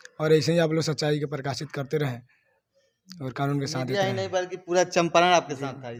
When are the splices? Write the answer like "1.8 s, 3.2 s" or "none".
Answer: none